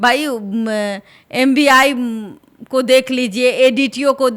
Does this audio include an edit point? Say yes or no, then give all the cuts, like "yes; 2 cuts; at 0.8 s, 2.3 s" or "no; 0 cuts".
no; 0 cuts